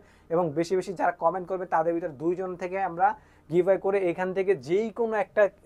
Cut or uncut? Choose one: uncut